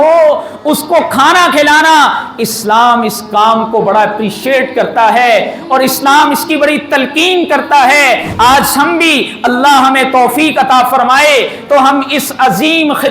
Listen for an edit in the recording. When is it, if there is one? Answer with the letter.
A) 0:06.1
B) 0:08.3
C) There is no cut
B